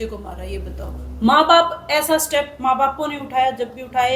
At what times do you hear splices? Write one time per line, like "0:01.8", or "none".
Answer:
none

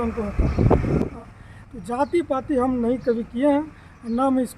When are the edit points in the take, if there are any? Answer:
0:01.1

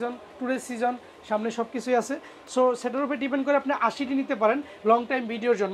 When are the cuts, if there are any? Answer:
none

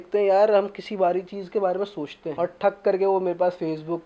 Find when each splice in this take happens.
0:02.2

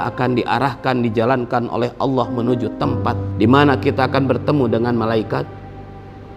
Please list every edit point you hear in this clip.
0:03.3

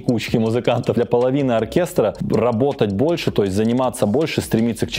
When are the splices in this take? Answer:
0:01.0

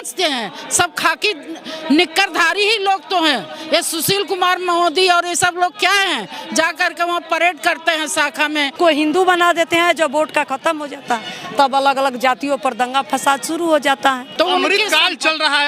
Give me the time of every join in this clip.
0:08.7
0:14.3

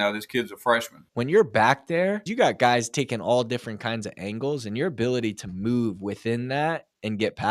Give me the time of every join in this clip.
0:01.1
0:02.3

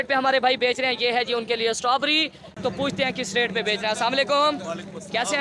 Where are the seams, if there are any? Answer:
0:02.6

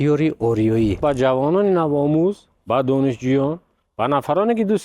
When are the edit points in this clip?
0:01.0

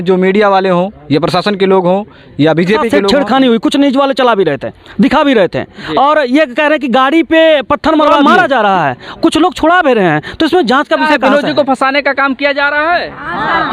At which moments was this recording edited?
0:03.0
0:08.1
0:11.1

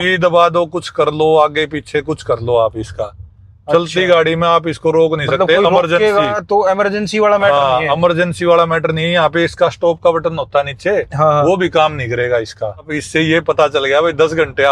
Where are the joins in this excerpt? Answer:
0:13.0

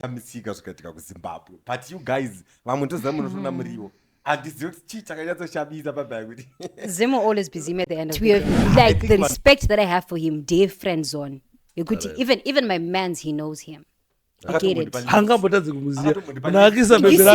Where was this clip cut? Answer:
0:08.2

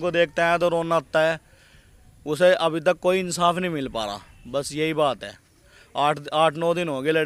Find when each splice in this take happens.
none

